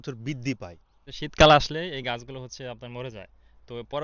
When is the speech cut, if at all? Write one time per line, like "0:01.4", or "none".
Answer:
0:01.0